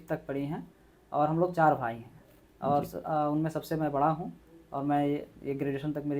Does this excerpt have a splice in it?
no; 0 cuts

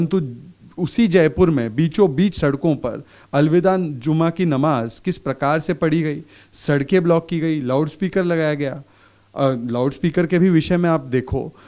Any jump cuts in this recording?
no; 0 cuts

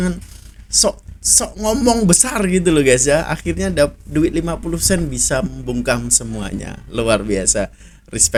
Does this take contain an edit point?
no; 0 cuts

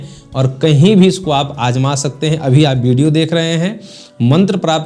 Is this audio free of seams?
yes; 0 cuts

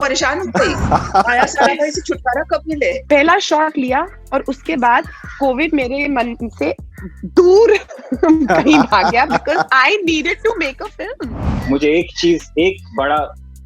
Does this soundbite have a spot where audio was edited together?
yes; 2 cuts; at 3.0 s, 11.5 s

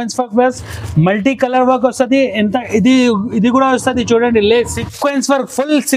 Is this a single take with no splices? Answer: no; 1 cut; at 4.8 s

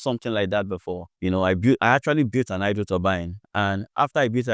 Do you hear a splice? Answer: yes; 1 cut; at 1.1 s

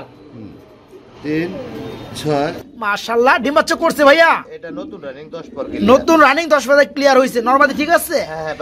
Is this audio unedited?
no; 1 cut; at 2.7 s

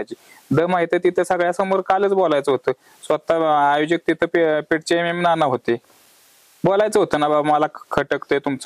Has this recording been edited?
no; 0 cuts

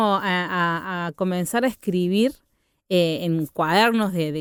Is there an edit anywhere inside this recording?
no; 0 cuts

